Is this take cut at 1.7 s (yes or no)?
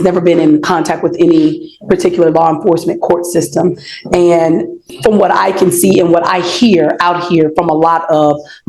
no